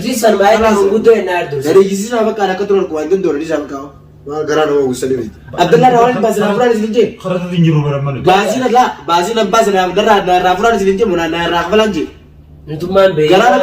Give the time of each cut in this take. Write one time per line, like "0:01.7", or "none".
0:05.4